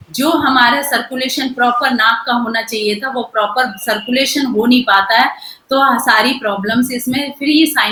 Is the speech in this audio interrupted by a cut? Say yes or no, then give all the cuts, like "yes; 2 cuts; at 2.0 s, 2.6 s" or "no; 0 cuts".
no; 0 cuts